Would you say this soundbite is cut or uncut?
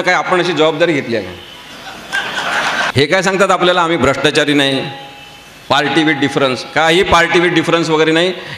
cut